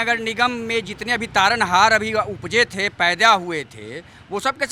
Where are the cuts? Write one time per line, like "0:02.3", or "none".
none